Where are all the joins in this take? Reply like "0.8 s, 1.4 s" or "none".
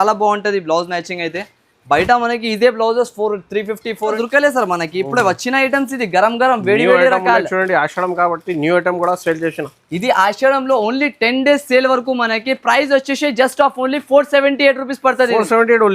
4.2 s

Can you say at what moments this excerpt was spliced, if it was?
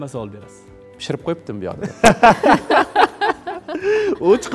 none

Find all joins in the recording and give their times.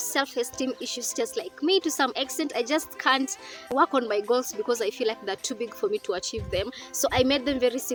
none

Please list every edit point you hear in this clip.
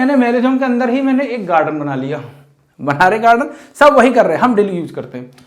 none

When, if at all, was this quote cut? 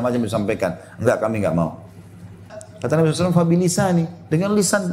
2.6 s

